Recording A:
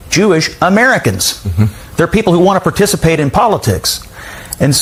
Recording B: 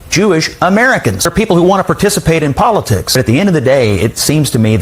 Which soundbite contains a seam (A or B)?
B